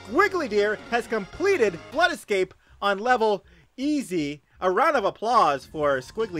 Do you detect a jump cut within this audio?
yes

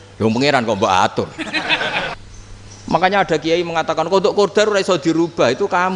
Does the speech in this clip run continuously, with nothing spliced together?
no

